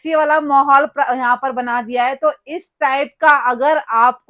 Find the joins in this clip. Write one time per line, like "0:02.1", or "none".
none